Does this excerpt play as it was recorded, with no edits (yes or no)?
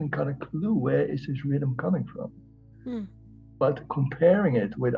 yes